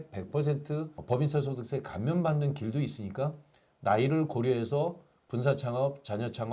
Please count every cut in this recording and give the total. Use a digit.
1